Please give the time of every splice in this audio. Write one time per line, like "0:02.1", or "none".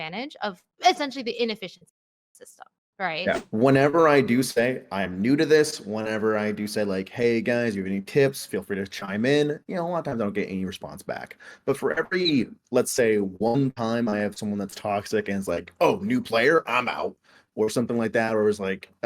0:03.4